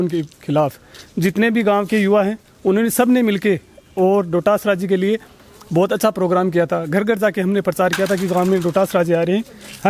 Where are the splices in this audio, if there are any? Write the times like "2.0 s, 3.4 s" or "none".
none

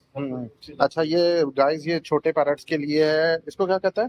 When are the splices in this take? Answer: none

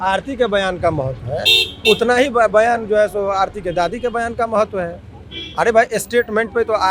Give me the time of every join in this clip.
none

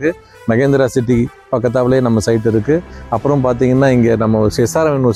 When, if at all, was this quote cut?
none

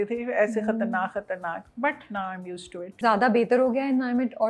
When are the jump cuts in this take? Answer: 1.7 s, 2.9 s

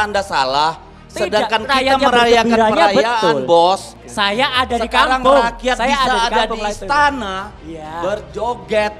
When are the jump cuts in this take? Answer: 4.0 s

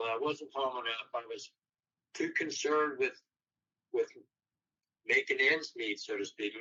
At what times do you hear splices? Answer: none

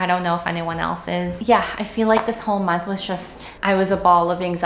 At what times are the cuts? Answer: 1.4 s

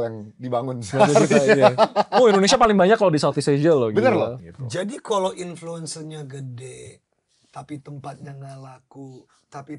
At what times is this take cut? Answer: 4.4 s

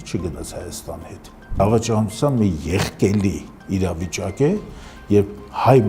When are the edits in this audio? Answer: 1.6 s

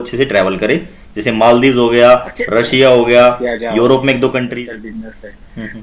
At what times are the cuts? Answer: 4.5 s

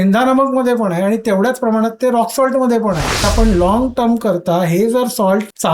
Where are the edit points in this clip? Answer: 3.3 s

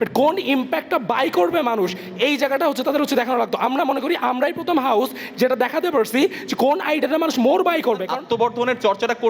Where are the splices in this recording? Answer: 8.1 s

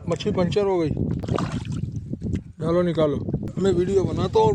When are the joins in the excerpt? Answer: 1.2 s, 3.5 s

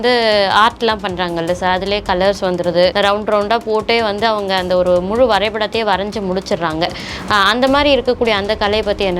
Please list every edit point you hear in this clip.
2.9 s

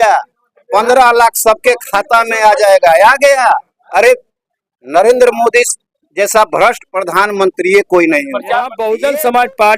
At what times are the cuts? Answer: 8.7 s

